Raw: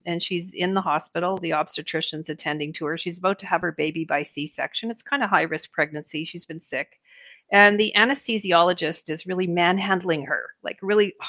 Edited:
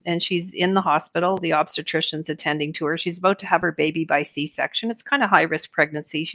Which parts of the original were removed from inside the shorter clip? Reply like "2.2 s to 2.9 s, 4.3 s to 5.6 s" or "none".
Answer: none